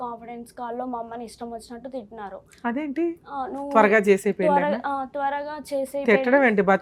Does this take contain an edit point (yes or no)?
no